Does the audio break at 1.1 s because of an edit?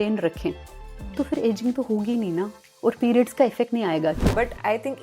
no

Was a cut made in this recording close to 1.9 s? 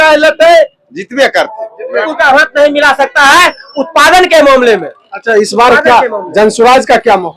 yes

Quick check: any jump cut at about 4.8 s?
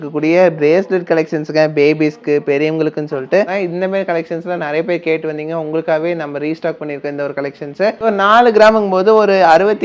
no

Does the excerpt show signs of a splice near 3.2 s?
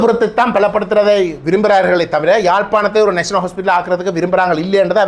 no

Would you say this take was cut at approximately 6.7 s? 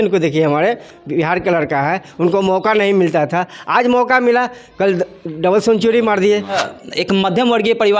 yes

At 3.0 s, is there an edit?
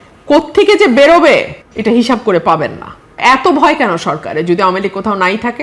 yes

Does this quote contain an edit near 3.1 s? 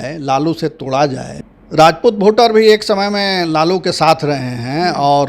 no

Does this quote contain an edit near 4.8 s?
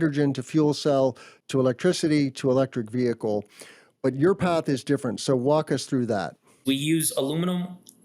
no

